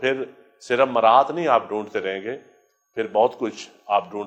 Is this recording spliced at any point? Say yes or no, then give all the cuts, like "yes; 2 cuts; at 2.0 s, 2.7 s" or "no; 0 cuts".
no; 0 cuts